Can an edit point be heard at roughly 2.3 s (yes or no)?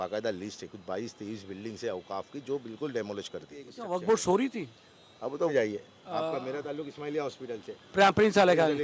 no